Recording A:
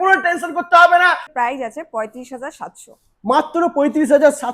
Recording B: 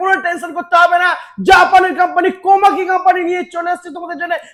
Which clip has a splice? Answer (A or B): A